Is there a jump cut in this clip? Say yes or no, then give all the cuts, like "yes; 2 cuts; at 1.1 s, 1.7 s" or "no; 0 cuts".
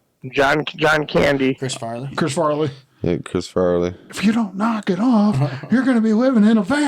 yes; 2 cuts; at 1.6 s, 4.1 s